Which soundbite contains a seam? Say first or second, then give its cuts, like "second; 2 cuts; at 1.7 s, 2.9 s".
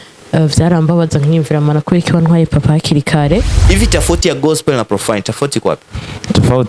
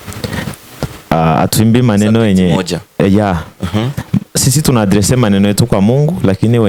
first; 1 cut; at 3.6 s